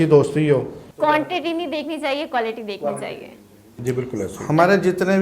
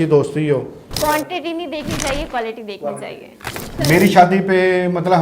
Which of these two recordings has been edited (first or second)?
second